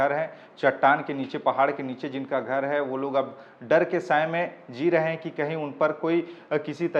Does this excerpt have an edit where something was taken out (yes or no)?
no